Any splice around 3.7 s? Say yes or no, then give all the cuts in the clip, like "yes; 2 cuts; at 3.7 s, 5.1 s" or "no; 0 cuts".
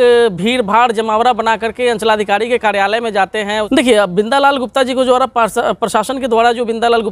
yes; 1 cut; at 3.7 s